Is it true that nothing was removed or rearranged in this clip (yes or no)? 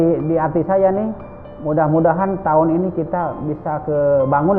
yes